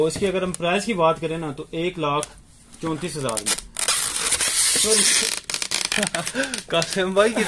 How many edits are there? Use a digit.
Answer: 0